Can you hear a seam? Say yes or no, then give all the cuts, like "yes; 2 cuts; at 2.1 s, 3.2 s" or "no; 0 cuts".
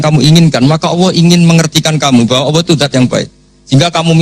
no; 0 cuts